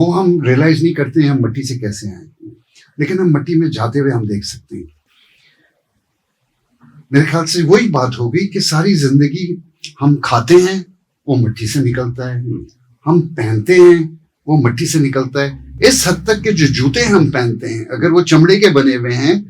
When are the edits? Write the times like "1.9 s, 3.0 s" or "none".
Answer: none